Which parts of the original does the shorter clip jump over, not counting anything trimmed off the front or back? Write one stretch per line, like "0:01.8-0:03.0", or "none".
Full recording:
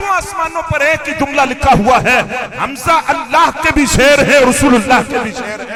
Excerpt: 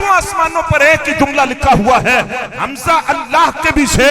none